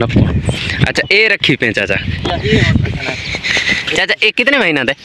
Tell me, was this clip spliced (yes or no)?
no